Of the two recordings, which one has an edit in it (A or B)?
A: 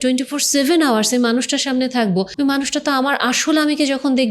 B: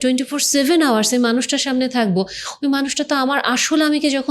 A